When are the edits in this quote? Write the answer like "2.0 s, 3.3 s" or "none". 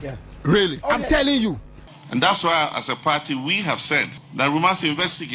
1.7 s, 4.2 s